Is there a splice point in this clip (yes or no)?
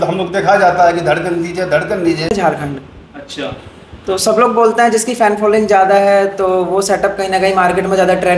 yes